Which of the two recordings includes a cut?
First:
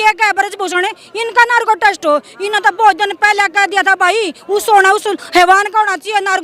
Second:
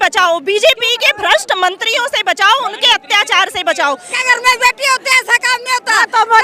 second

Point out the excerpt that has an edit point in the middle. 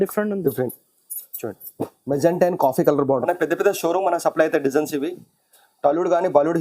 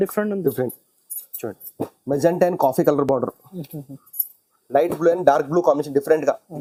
first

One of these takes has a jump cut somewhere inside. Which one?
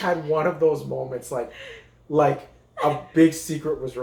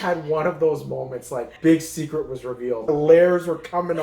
second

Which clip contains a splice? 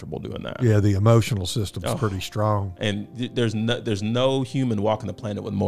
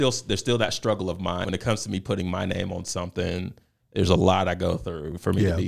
second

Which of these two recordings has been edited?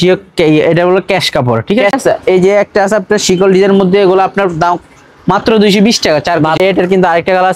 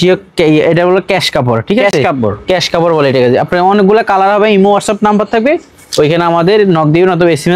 first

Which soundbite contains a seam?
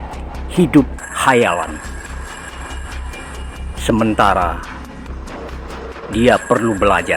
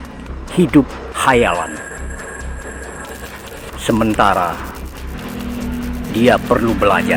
first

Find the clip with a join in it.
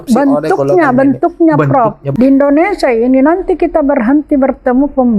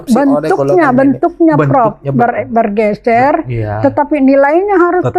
first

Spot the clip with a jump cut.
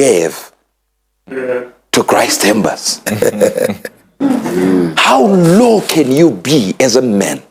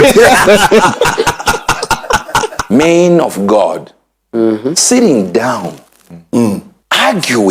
second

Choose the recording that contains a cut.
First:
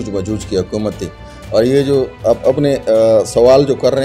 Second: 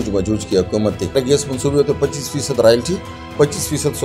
second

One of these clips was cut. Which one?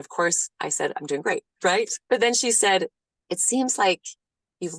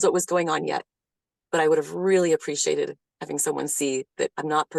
first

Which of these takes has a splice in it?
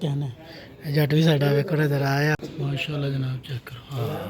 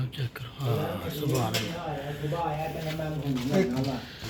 first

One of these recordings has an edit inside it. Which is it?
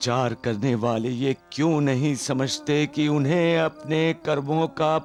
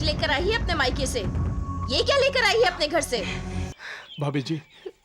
second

